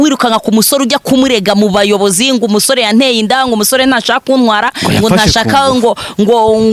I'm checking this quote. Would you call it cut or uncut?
uncut